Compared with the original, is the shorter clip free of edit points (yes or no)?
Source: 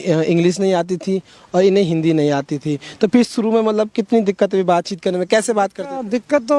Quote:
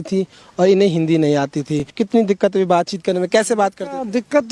no